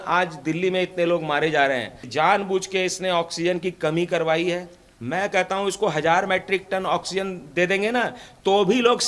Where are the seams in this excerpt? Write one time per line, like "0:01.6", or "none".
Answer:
0:02.1

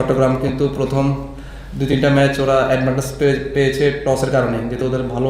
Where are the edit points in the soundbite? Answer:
none

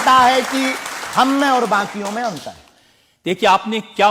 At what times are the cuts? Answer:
none

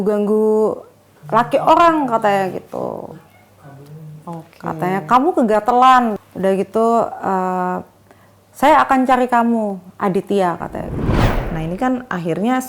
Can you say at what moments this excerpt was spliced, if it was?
0:06.3
0:11.3

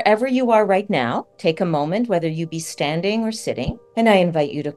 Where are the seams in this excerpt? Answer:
0:01.3
0:03.8

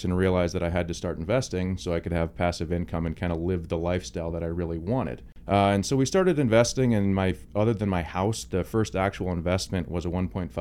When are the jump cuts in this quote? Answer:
0:05.3

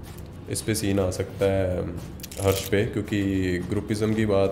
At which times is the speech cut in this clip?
none

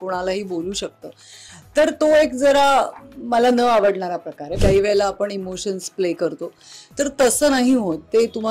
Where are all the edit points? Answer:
0:04.4

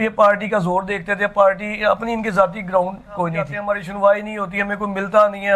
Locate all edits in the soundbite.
0:03.5

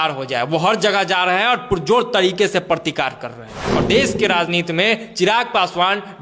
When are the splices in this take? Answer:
0:03.6

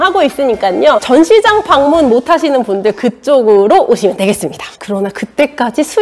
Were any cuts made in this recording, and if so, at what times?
0:01.0
0:04.7

